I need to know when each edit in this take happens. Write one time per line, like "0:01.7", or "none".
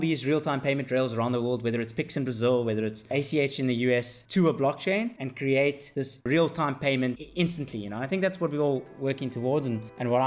0:04.2
0:05.2
0:05.9